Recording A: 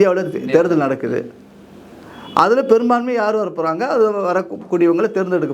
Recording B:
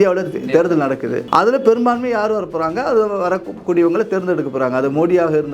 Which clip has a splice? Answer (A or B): B